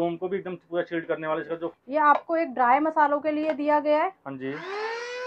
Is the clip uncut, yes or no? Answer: no